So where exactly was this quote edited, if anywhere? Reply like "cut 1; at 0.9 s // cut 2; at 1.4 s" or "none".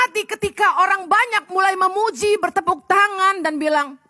none